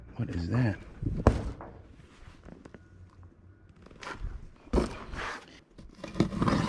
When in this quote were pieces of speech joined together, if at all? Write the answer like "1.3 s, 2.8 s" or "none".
5.4 s

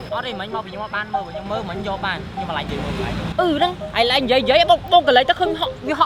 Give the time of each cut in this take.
none

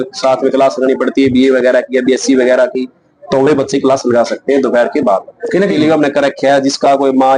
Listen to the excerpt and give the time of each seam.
5.7 s

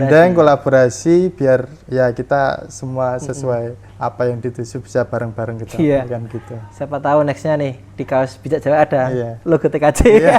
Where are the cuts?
3.8 s

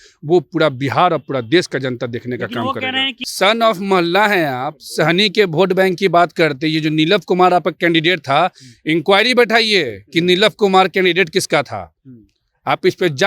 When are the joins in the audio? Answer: 3.1 s

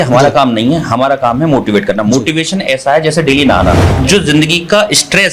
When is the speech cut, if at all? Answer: 3.9 s

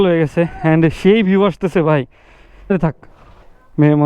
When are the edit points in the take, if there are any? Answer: 2.7 s

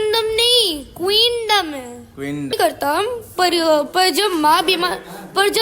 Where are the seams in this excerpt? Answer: 2.5 s

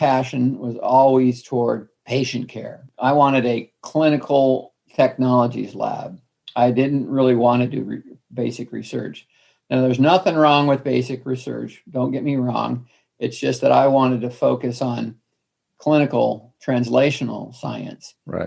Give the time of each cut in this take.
1.9 s, 4.8 s

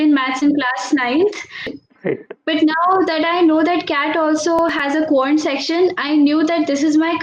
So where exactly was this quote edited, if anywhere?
1.6 s

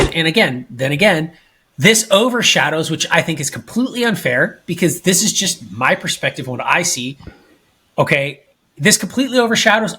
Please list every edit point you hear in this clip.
none

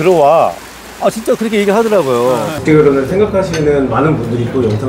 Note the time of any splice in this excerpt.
2.5 s

